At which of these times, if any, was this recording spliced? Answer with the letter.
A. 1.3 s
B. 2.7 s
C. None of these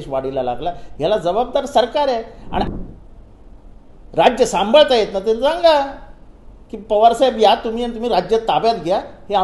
B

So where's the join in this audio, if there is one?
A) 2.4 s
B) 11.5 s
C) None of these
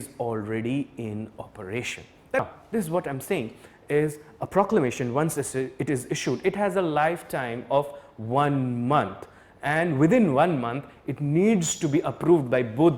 A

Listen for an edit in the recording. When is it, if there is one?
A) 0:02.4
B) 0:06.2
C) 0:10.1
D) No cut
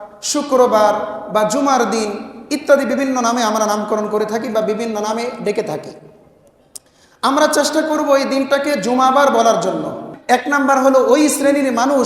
C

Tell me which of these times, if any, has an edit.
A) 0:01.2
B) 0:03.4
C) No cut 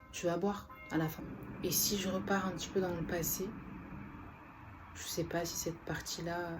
A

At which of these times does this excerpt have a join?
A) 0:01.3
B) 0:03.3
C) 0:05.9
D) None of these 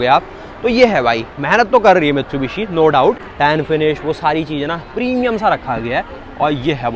B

